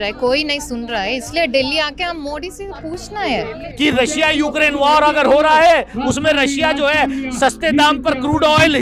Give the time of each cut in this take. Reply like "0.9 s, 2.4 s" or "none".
3.7 s